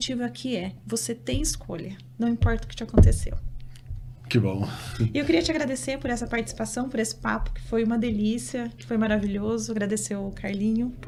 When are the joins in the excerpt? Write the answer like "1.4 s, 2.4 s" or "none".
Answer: none